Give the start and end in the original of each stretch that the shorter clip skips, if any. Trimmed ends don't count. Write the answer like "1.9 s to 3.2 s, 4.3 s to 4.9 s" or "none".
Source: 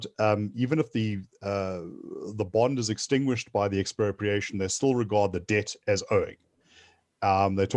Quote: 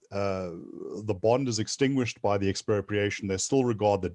none